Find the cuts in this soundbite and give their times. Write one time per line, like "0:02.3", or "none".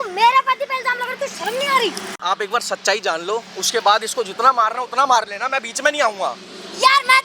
0:02.2